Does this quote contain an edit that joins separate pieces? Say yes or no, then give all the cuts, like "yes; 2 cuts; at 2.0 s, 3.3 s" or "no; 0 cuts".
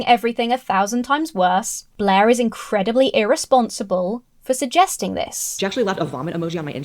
yes; 2 cuts; at 1.8 s, 5.4 s